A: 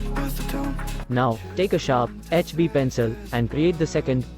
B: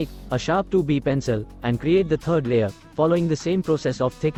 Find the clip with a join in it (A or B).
A